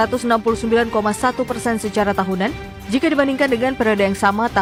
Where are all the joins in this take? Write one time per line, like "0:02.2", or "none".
none